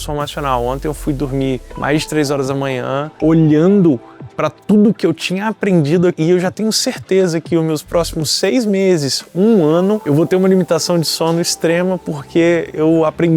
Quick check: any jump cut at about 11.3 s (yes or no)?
no